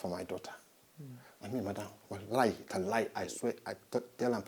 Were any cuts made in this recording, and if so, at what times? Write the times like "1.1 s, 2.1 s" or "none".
none